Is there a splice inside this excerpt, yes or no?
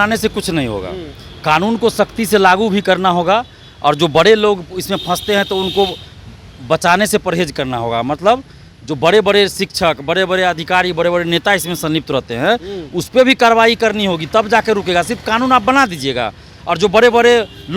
no